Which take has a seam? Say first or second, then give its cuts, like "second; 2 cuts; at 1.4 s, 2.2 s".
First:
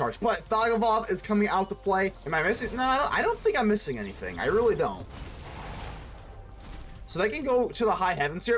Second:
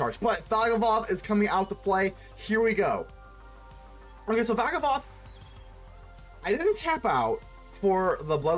first; 1 cut; at 2.2 s